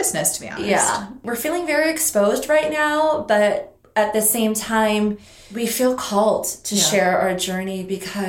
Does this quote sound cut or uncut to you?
cut